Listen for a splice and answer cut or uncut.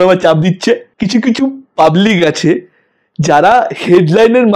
cut